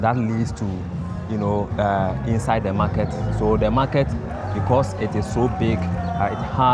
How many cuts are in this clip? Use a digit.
0